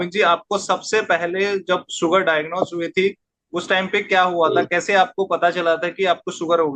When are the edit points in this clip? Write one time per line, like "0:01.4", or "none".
none